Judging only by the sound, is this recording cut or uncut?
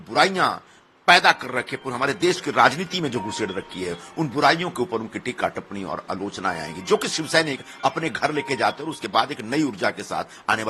uncut